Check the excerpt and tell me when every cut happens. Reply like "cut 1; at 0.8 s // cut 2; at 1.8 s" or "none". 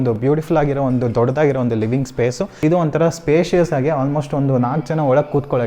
cut 1; at 2.5 s